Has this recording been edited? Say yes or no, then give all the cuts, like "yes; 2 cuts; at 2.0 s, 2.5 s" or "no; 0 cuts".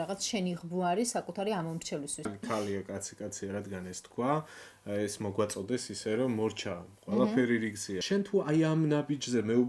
yes; 2 cuts; at 2.3 s, 7.9 s